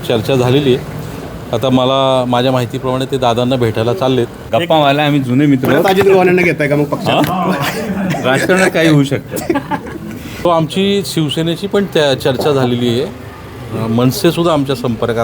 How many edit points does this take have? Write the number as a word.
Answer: two